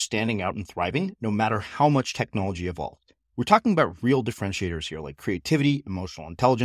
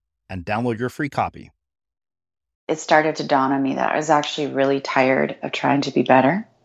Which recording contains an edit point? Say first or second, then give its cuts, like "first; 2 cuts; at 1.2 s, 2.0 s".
second; 1 cut; at 2.6 s